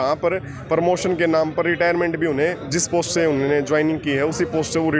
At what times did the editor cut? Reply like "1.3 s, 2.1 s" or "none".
none